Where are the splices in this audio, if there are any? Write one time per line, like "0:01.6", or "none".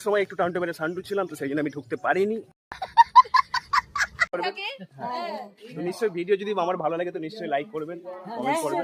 0:04.3